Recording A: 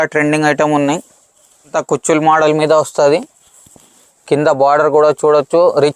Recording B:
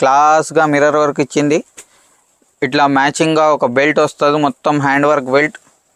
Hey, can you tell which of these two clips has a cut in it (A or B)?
A